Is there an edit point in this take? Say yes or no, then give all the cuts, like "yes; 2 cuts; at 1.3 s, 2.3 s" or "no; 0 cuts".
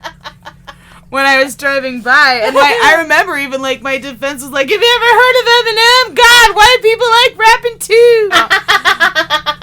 yes; 1 cut; at 8.3 s